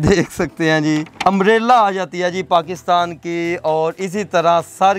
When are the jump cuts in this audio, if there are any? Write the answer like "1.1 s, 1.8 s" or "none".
1.1 s